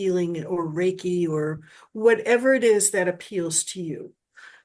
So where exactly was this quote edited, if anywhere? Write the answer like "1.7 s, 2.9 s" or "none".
none